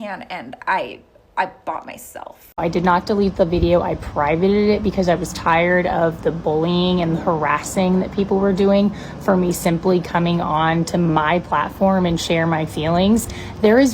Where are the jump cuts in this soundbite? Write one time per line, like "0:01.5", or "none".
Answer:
0:02.4